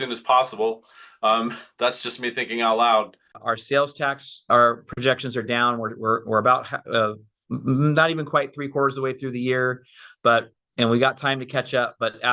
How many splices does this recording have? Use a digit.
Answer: 1